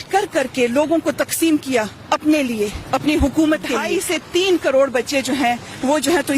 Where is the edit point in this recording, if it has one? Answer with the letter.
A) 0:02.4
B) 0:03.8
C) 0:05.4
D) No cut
B